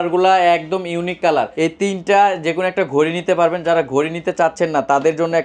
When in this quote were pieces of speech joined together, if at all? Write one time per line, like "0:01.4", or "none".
0:01.5